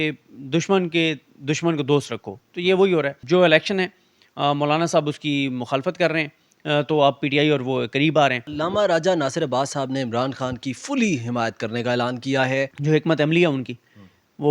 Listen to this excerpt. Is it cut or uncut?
cut